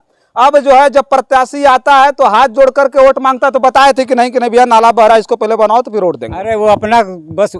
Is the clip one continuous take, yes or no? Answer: yes